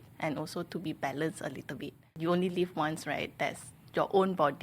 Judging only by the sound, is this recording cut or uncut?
cut